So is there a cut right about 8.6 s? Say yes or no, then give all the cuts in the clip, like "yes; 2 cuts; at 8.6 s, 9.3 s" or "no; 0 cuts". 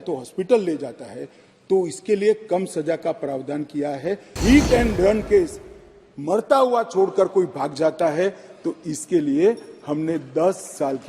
no; 1 cut; at 4.3 s